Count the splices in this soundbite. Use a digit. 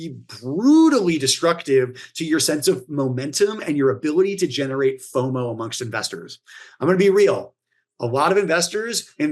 0